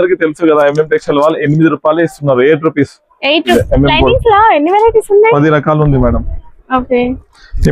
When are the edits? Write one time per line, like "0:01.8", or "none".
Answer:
0:03.5